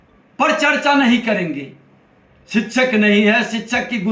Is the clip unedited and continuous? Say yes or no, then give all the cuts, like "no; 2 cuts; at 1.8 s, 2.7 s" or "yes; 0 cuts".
yes; 0 cuts